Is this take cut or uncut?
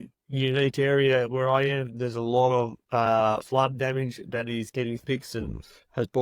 uncut